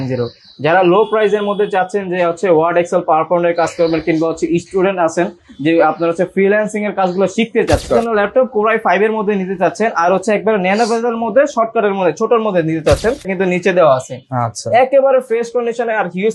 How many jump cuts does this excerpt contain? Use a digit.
2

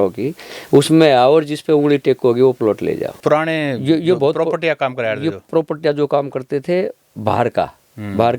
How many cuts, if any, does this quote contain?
1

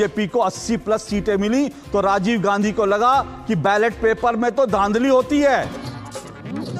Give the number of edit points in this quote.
1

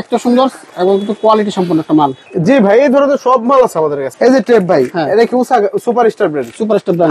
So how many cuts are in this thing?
2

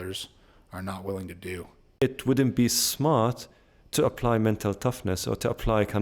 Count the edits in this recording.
1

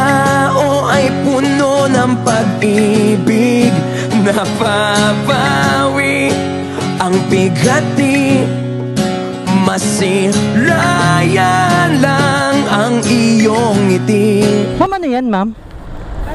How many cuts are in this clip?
1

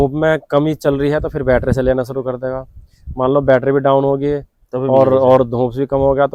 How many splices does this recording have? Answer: 0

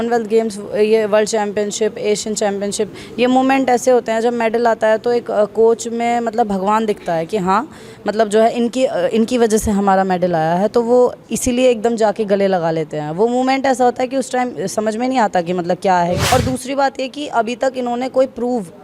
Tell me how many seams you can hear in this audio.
1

